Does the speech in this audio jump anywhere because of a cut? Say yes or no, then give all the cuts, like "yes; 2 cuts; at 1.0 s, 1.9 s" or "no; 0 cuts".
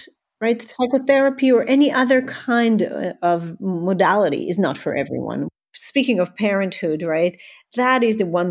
yes; 1 cut; at 5.5 s